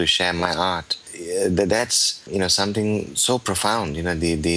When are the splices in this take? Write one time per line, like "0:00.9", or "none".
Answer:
0:01.1
0:02.3